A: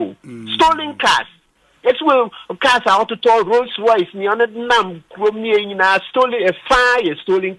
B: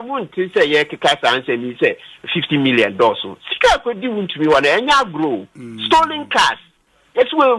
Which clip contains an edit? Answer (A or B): A